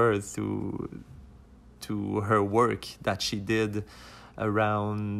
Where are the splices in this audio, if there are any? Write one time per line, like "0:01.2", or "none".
none